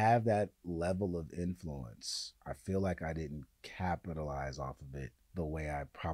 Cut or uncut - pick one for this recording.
cut